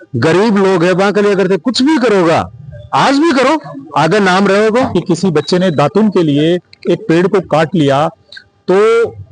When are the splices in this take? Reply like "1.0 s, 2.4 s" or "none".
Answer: 4.9 s